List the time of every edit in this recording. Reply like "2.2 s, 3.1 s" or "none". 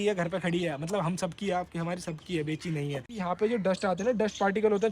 3.1 s